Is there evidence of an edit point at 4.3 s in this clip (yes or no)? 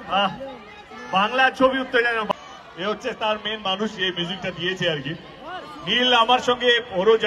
no